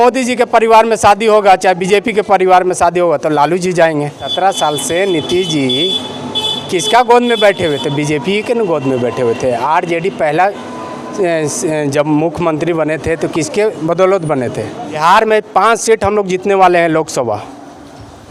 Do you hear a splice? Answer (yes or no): yes